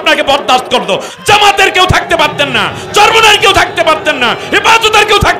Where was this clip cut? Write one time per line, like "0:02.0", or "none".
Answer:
0:01.1